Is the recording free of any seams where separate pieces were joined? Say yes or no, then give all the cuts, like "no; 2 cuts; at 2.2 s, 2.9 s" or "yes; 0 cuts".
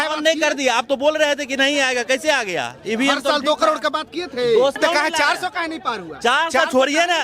no; 1 cut; at 4.7 s